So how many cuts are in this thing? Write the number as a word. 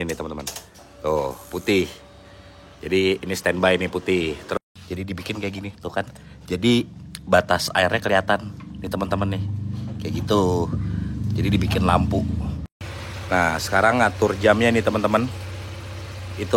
two